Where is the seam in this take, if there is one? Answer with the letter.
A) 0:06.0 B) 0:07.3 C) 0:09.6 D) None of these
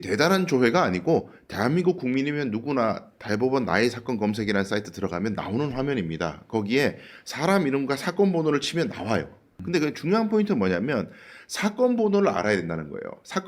C